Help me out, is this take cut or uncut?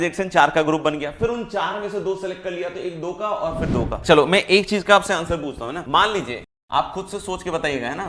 cut